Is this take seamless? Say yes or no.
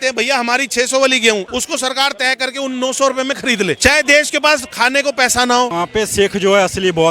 no